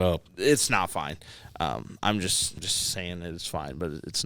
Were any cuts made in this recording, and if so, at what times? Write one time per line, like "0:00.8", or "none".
0:02.7